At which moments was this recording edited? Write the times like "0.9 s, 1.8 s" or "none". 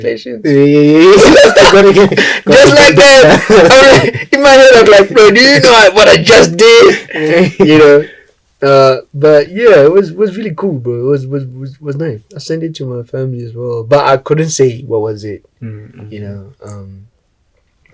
none